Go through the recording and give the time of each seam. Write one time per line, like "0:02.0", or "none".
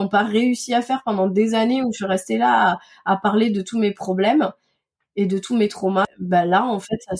0:06.0